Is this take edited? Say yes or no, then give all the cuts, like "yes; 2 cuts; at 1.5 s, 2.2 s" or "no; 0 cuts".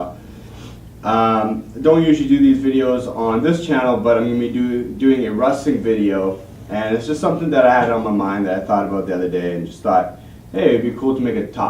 no; 0 cuts